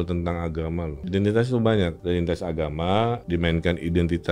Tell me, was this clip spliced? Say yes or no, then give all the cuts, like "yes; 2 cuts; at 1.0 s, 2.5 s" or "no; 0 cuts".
yes; 3 cuts; at 1.1 s, 2.0 s, 3.2 s